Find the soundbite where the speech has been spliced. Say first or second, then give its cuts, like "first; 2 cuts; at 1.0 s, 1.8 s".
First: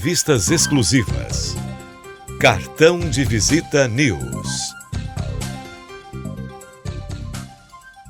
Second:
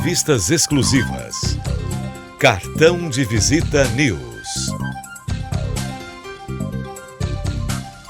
second; 2 cuts; at 4.2 s, 6.1 s